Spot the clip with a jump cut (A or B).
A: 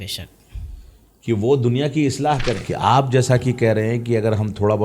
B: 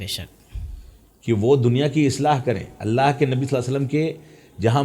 A